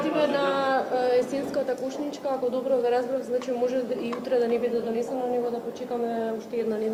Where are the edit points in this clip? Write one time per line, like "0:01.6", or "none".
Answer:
none